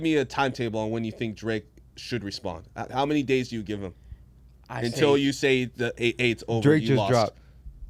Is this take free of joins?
yes; 0 cuts

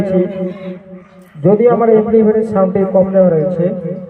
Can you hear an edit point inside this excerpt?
no; 0 cuts

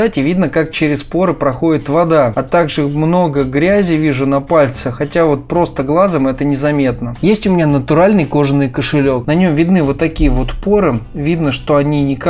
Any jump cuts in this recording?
no; 0 cuts

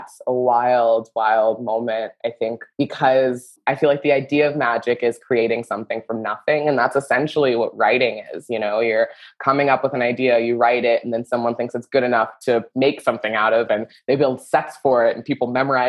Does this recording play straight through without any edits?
no; 2 cuts; at 2.6 s, 3.5 s

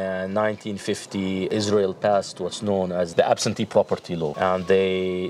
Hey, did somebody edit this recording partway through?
yes; 3 cuts; at 1.5 s, 3.1 s, 4.3 s

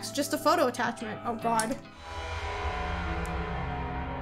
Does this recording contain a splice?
no; 0 cuts

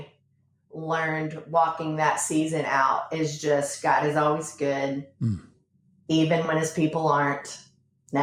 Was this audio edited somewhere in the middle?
no; 0 cuts

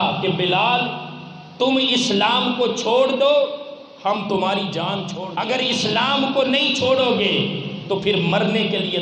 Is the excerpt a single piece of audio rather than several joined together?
no; 1 cut; at 5.1 s

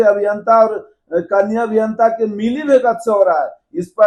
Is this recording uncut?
yes; 0 cuts

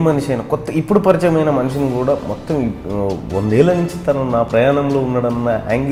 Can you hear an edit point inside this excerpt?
no; 0 cuts

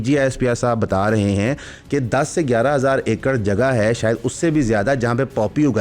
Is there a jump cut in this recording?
no; 0 cuts

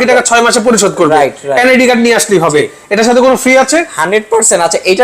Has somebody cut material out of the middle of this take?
no; 0 cuts

